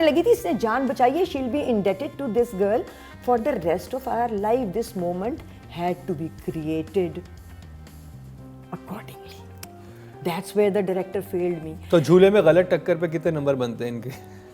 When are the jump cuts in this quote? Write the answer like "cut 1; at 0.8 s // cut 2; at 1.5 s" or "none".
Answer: none